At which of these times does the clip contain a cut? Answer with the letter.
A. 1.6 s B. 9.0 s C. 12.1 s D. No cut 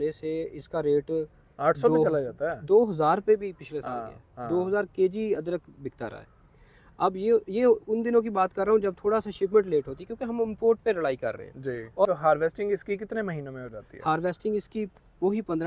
C